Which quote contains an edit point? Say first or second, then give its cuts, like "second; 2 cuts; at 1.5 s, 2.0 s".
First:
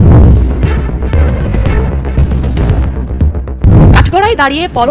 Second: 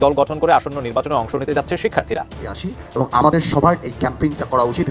second; 1 cut; at 2.5 s